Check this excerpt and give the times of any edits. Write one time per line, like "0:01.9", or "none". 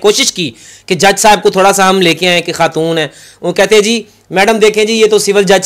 none